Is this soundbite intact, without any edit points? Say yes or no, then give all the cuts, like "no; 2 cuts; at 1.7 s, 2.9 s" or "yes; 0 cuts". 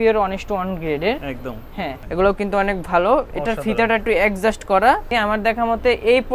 no; 2 cuts; at 2.0 s, 5.1 s